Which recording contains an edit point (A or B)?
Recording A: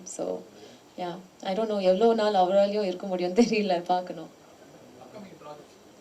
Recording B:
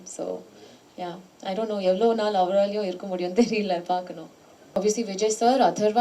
B